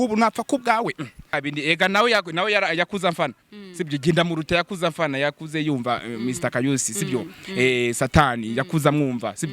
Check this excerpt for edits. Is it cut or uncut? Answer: cut